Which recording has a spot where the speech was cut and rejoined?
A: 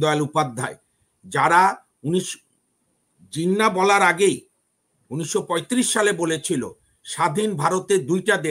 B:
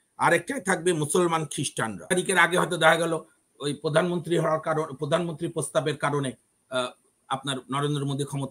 B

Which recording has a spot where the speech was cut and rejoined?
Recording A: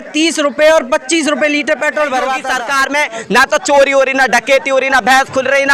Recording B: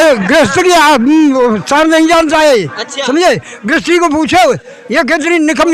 A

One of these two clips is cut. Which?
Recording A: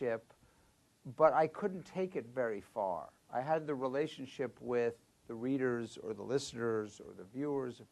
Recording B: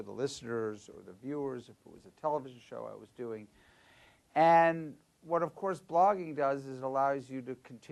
A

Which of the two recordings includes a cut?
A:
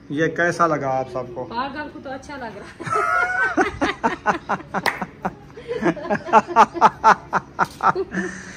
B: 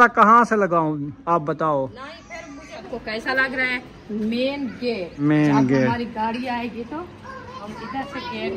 B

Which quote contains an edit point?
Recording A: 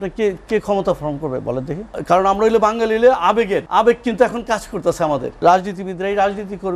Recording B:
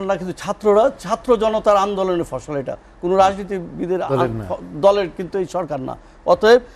A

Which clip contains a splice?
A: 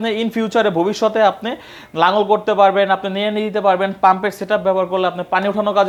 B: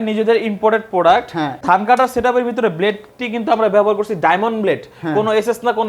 B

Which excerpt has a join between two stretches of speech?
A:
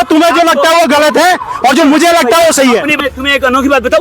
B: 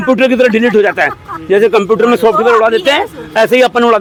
A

